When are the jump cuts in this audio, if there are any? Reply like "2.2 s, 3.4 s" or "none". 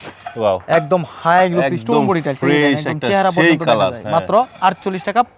none